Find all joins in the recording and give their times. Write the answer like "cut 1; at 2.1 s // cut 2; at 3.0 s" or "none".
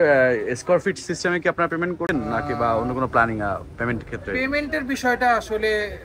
cut 1; at 2.1 s